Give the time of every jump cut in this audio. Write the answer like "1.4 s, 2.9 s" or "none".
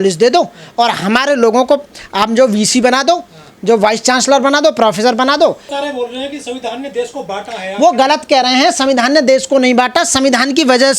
5.7 s